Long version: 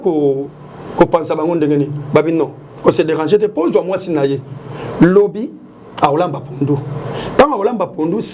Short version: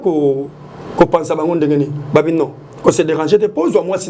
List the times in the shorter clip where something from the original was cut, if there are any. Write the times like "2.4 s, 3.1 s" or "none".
none